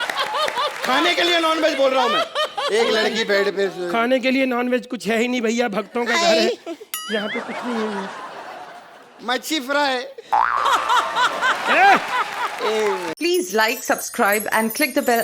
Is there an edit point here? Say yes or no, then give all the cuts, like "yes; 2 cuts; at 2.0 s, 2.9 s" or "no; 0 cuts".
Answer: yes; 1 cut; at 13.1 s